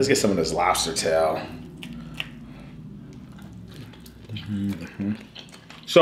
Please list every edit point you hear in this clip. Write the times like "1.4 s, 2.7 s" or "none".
none